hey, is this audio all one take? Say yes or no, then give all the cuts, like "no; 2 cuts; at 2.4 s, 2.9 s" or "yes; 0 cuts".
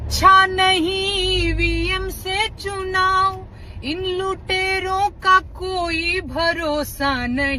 yes; 0 cuts